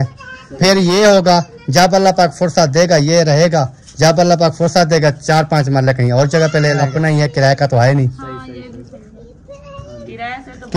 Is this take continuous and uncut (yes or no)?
no